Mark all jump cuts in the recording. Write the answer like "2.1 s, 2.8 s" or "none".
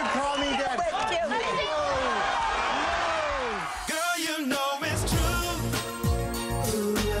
3.7 s